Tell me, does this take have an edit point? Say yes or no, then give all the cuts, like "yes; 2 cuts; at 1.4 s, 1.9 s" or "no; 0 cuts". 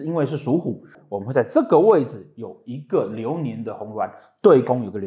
yes; 1 cut; at 0.9 s